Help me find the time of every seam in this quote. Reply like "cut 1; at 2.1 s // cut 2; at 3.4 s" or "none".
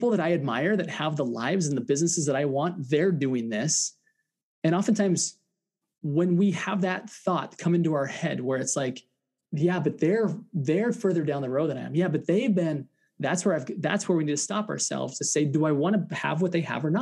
cut 1; at 9.4 s